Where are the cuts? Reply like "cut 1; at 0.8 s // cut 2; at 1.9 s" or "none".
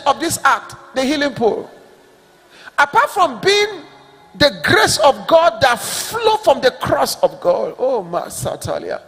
none